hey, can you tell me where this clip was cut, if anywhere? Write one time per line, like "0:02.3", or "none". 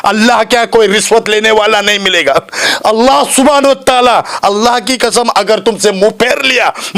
none